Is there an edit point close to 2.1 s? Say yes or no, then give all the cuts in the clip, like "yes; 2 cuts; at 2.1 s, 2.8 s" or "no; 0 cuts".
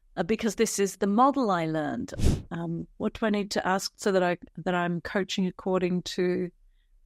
yes; 1 cut; at 2.1 s